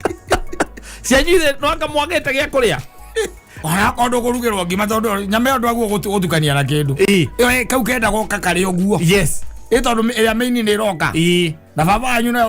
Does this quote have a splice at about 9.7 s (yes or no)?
no